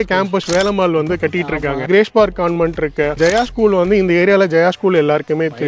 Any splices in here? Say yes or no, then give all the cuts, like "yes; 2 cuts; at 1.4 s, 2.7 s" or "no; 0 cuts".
yes; 2 cuts; at 1.9 s, 3.1 s